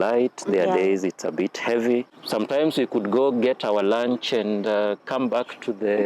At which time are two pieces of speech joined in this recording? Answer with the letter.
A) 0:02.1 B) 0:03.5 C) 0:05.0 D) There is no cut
A